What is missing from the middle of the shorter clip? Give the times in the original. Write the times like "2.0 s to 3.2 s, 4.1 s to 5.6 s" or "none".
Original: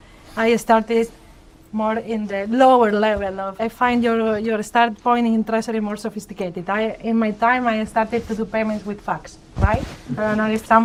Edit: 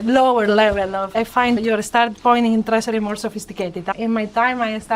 4.0 s to 4.4 s, 6.7 s to 7.0 s